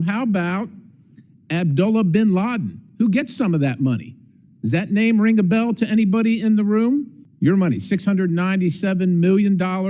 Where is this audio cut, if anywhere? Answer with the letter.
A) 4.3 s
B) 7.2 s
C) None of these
B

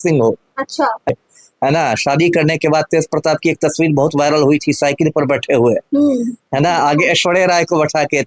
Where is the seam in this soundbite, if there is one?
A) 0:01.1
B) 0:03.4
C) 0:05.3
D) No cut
A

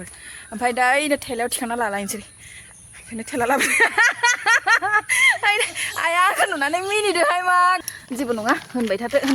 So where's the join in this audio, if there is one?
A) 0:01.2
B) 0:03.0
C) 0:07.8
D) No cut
C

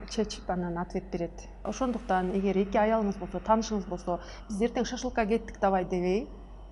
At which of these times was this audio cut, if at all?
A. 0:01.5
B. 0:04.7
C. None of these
A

